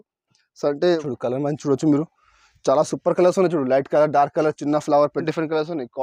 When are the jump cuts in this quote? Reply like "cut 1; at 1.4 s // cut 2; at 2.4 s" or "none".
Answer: cut 1; at 1.0 s // cut 2; at 5.2 s

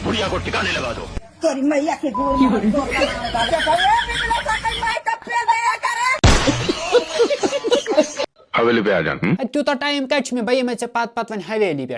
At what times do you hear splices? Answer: cut 1; at 8.1 s

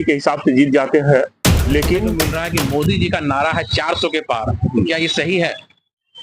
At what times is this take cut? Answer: cut 1; at 2.3 s

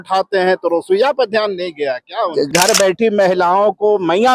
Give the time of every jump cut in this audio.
cut 1; at 2.5 s

